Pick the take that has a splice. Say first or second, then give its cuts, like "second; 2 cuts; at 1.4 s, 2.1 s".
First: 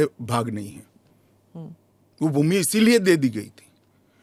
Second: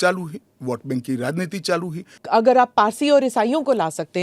second; 1 cut; at 2.2 s